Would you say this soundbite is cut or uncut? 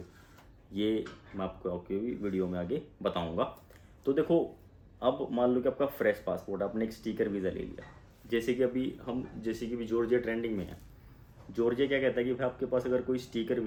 uncut